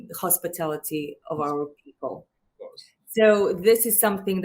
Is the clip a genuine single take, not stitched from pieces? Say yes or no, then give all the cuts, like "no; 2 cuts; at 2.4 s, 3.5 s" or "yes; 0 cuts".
yes; 0 cuts